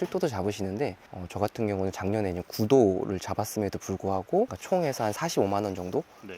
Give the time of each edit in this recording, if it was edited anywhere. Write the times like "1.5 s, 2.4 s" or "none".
5.2 s